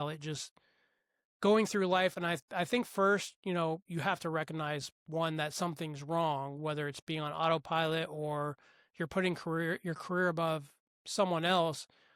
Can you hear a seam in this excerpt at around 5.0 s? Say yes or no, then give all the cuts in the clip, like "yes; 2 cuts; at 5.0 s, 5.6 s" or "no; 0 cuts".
no; 0 cuts